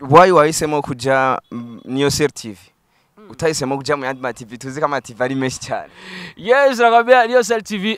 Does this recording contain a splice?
no; 0 cuts

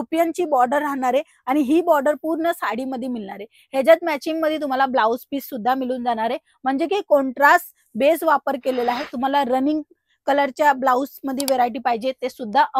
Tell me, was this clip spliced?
no; 0 cuts

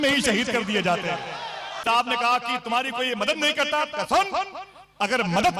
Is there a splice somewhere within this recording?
yes; 1 cut; at 1.8 s

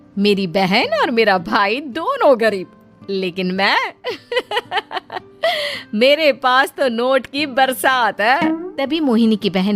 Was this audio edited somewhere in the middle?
yes; 1 cut; at 8.7 s

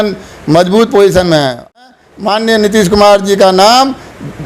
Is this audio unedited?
no; 1 cut; at 1.8 s

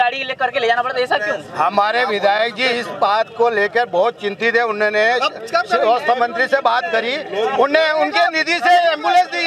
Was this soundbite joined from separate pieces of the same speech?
no; 0 cuts

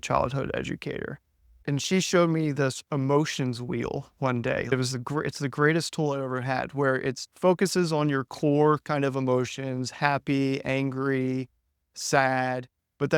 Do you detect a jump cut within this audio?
yes; 3 cuts; at 1.6 s, 4.7 s, 7.3 s

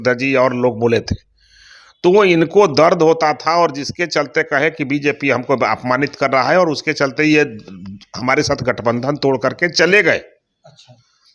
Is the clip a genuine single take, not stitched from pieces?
yes; 0 cuts

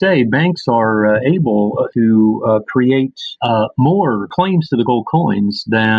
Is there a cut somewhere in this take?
yes; 3 cuts; at 1.9 s, 3.3 s, 4.3 s

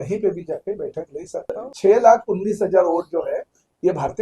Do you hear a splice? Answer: yes; 1 cut; at 1.5 s

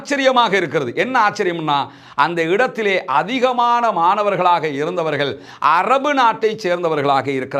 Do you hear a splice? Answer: no; 0 cuts

